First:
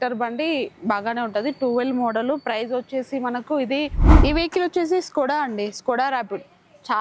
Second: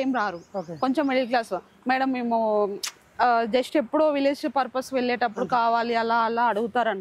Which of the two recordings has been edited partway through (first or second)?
first